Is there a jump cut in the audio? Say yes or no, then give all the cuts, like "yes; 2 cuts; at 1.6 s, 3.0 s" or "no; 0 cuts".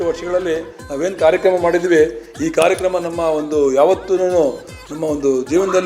no; 0 cuts